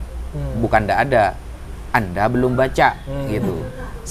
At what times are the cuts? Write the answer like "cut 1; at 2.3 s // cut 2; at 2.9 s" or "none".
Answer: none